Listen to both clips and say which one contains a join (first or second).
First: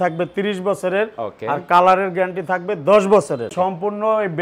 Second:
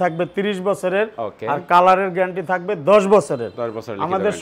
first